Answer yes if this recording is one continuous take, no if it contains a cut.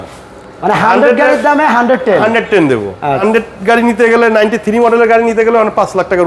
no